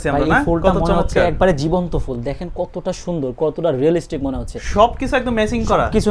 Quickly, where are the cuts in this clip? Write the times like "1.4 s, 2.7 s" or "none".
none